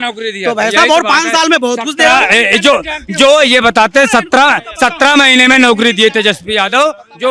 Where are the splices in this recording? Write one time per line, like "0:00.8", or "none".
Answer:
none

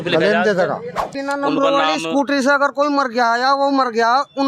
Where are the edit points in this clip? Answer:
0:01.2

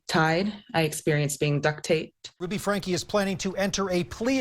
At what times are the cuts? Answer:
0:02.4

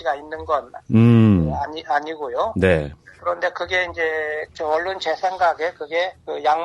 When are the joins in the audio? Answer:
0:04.4

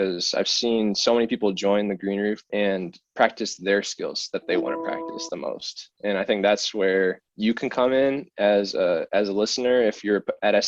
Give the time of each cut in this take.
0:02.4
0:07.3

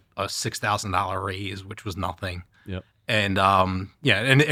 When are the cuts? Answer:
none

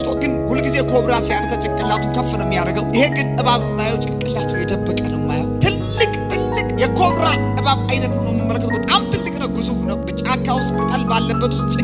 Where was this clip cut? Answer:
none

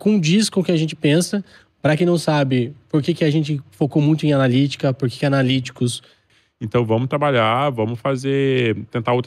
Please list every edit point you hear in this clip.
0:06.3

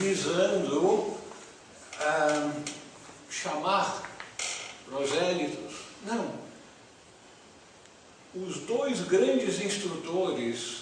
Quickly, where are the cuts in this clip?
0:01.2

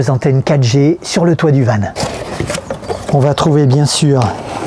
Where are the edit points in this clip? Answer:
0:01.9

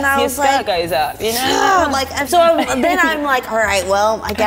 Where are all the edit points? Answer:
0:02.2

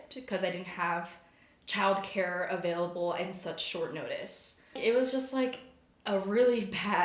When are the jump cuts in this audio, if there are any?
0:04.8

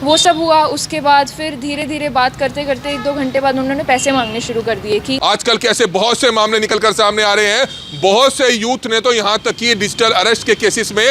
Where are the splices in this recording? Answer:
0:05.2

